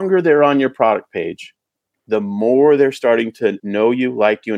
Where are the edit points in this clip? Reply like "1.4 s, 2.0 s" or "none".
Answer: 3.6 s